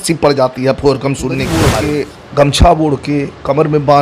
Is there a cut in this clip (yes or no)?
yes